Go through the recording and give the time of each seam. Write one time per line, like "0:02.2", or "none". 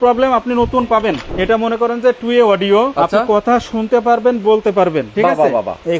0:01.2
0:02.9
0:05.3